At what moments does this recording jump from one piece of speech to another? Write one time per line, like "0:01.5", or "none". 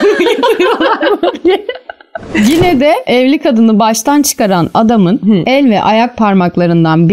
0:02.2